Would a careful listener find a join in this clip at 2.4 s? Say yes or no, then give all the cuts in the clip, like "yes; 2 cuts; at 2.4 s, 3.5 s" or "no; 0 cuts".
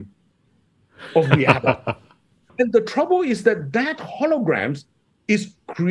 yes; 1 cut; at 2.4 s